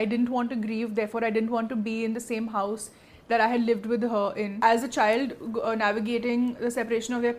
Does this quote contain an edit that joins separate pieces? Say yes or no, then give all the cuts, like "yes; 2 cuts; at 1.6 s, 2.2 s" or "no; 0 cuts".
yes; 1 cut; at 4.5 s